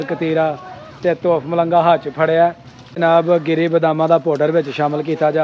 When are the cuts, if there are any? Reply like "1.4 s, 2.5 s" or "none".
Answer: 3.0 s